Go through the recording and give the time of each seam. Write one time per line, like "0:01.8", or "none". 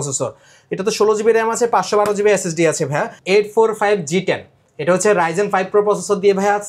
0:03.2